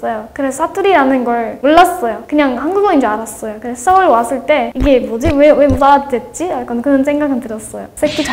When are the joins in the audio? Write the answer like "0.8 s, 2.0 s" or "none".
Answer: none